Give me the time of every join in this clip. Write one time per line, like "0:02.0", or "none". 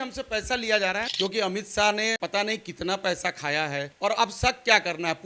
0:01.1
0:02.2
0:03.9